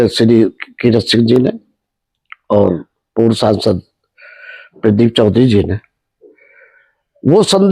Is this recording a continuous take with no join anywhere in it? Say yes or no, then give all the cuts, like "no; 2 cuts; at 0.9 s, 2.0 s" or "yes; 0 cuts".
yes; 0 cuts